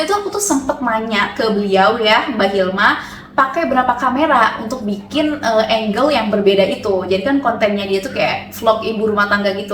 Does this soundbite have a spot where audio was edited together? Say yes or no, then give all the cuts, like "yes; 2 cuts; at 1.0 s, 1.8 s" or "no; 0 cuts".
no; 0 cuts